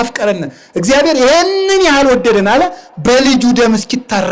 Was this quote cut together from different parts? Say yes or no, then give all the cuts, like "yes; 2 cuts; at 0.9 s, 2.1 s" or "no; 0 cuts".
no; 0 cuts